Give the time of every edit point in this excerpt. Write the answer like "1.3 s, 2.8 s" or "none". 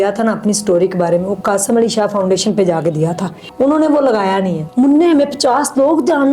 3.4 s, 4.6 s